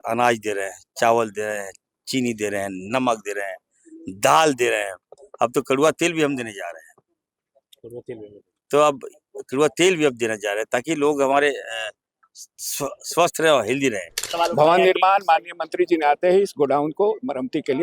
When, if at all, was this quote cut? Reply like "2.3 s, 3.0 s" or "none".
14.2 s